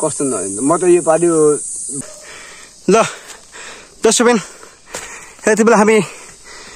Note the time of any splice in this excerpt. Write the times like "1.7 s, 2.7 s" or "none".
1.9 s